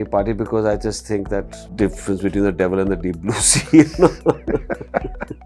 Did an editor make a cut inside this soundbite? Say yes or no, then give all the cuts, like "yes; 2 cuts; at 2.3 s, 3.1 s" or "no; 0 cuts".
no; 0 cuts